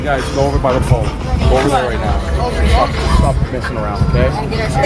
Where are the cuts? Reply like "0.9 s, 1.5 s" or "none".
none